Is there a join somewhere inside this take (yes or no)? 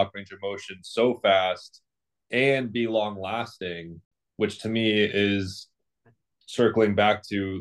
no